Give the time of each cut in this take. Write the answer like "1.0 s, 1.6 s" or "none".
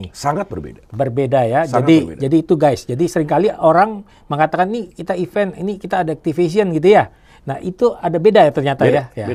none